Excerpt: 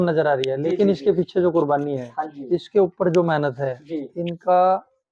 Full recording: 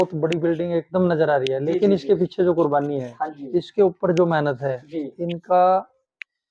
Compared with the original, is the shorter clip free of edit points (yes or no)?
yes